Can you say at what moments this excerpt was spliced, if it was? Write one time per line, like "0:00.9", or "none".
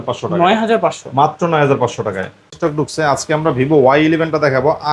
0:02.6